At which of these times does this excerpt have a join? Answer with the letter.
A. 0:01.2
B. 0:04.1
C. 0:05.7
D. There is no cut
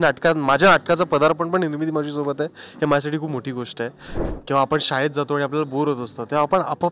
B